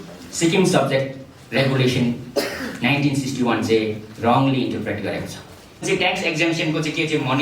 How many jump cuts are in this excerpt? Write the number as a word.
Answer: one